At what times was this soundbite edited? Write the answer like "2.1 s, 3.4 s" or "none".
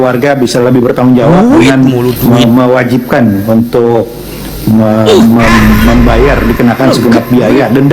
none